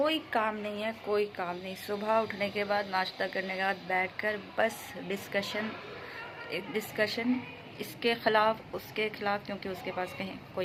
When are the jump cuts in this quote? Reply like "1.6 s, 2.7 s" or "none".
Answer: none